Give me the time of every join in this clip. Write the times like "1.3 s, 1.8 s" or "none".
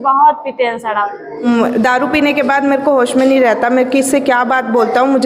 1.5 s